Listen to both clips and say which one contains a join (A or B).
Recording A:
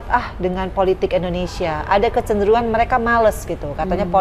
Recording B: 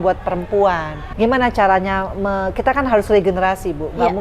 B